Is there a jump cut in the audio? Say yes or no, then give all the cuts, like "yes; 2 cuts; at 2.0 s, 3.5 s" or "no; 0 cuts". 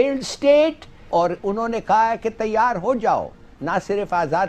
yes; 1 cut; at 1.1 s